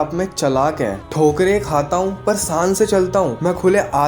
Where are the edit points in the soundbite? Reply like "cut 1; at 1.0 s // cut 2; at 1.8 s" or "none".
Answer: cut 1; at 1.0 s